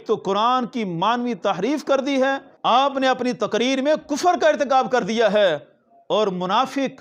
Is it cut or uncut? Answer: cut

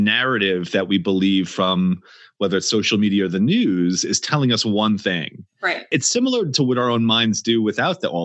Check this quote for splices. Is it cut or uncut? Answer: uncut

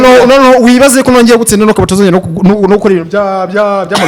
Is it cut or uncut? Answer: uncut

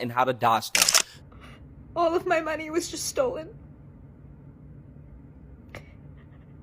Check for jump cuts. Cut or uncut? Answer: cut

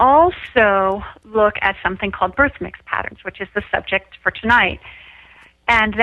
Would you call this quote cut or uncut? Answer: uncut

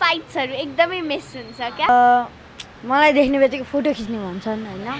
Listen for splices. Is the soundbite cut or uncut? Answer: cut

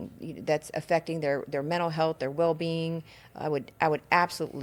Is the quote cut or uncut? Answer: uncut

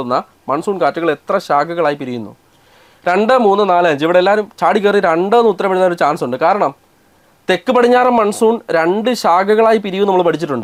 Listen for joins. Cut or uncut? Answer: uncut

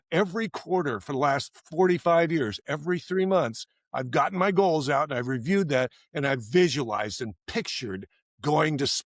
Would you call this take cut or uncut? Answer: uncut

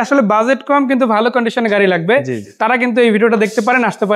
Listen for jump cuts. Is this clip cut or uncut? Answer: uncut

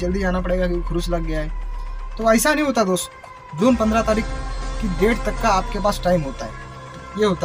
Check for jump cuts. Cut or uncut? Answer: cut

